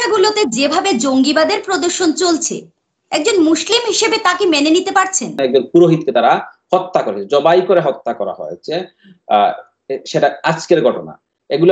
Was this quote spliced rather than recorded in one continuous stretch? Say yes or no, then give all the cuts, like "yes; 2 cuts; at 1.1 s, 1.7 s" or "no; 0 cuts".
yes; 1 cut; at 5.4 s